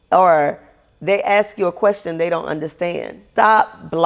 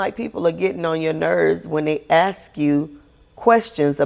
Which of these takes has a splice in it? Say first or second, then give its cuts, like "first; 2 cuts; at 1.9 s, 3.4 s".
first; 1 cut; at 3.1 s